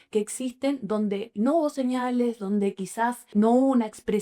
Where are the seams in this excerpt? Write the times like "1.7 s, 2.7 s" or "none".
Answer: 3.3 s